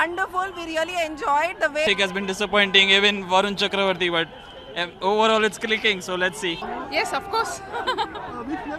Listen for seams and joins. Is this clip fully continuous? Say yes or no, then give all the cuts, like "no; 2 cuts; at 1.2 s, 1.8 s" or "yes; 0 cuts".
no; 2 cuts; at 1.9 s, 6.6 s